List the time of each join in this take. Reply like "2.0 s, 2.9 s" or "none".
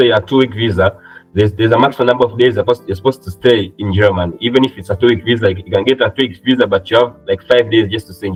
none